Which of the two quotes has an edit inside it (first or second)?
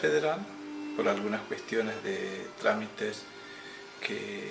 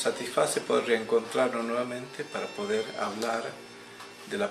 second